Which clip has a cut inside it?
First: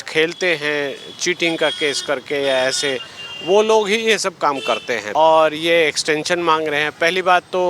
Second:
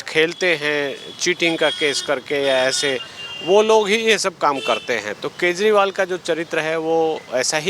first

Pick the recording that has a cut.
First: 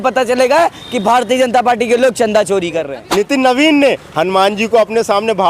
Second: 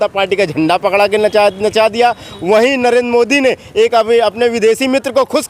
first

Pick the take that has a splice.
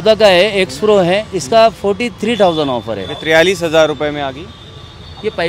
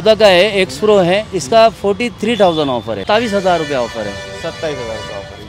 second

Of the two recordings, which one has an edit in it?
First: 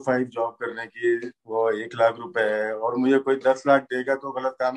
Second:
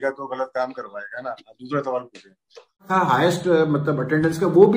second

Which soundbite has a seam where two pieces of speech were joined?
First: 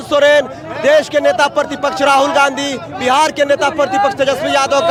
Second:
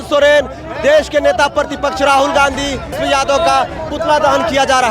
second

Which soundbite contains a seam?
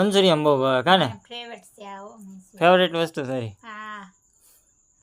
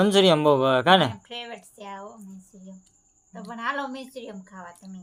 first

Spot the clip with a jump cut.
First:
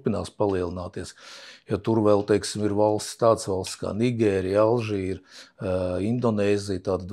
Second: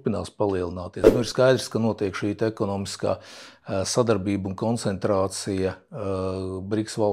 second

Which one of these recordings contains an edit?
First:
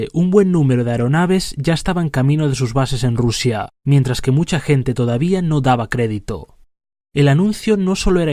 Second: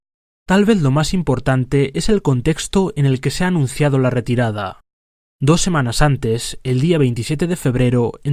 second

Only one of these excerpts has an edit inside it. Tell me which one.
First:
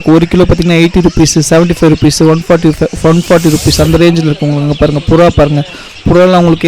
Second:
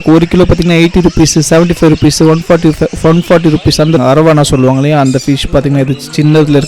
second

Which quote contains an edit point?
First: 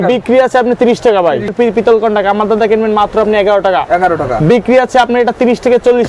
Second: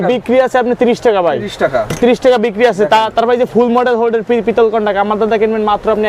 first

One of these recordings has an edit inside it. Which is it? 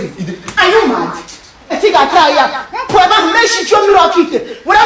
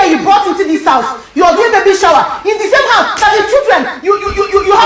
first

